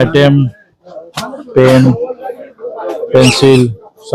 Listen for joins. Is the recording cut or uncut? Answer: uncut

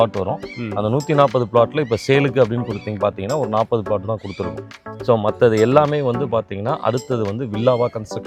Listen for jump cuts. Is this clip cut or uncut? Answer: uncut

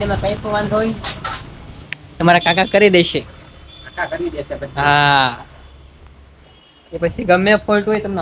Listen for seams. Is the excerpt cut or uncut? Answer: uncut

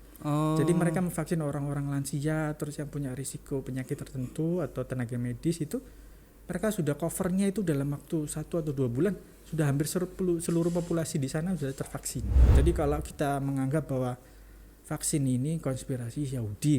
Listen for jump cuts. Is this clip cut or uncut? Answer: cut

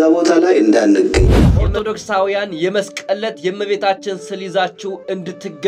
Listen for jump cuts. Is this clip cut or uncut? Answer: uncut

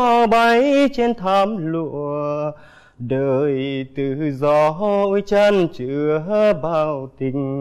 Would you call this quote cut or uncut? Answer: uncut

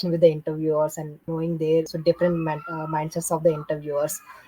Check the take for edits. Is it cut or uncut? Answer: cut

